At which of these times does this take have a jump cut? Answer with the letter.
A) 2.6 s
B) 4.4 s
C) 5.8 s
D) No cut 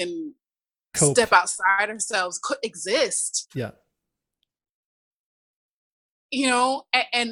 D